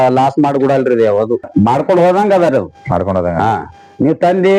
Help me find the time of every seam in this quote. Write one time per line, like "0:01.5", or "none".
0:01.5